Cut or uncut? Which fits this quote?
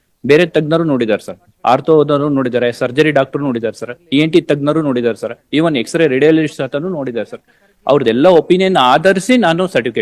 uncut